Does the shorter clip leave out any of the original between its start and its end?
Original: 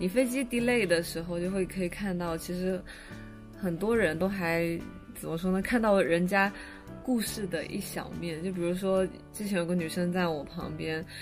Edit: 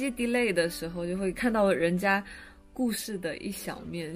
yes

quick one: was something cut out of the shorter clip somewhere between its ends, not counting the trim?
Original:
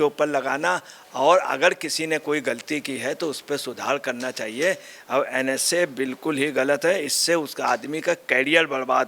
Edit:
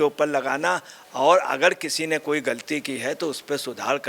no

